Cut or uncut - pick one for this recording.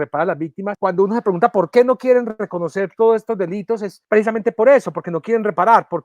cut